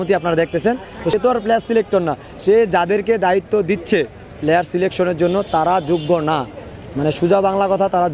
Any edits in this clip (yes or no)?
yes